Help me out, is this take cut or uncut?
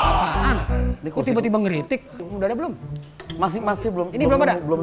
cut